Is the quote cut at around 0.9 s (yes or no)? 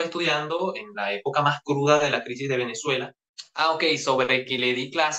no